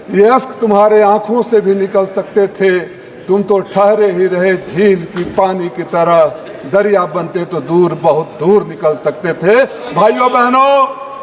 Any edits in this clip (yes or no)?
yes